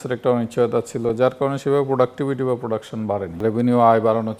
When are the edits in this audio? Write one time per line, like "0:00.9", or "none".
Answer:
0:03.4